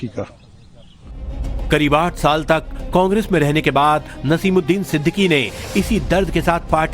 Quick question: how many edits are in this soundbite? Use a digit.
1